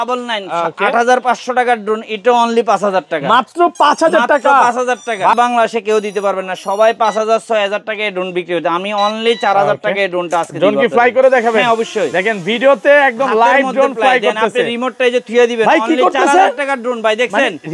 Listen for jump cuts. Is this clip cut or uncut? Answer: cut